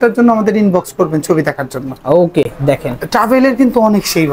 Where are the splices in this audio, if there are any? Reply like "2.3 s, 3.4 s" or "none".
none